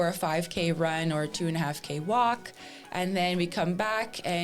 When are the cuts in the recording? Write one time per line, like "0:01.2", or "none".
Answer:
none

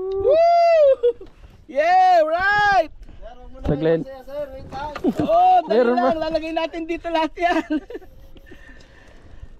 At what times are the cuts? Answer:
none

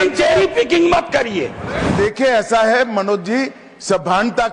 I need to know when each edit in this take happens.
none

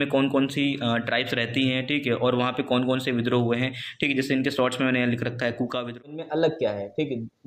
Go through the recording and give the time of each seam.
0:05.8

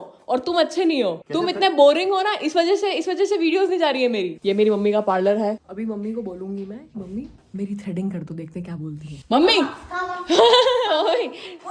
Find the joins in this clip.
none

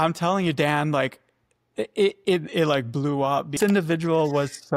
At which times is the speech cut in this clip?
0:03.6

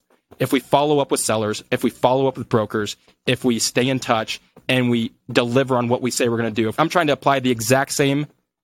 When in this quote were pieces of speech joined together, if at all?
0:06.7

